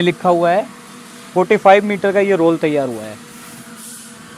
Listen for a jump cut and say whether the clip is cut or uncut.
uncut